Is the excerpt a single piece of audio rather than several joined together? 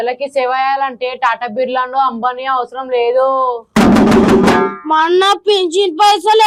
yes; 0 cuts

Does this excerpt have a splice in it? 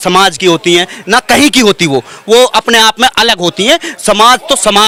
no; 0 cuts

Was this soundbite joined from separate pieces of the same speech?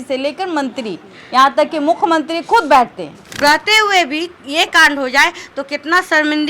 yes; 1 cut; at 3.3 s

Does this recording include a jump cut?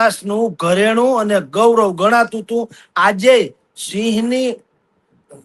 no; 0 cuts

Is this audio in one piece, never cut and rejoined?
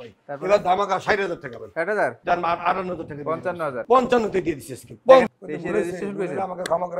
no; 3 cuts; at 2.2 s, 3.8 s, 5.3 s

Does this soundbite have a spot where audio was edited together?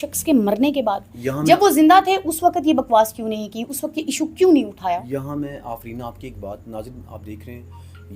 no; 0 cuts

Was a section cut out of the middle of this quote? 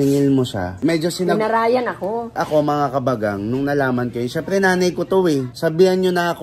yes; 2 cuts; at 2.4 s, 5.5 s

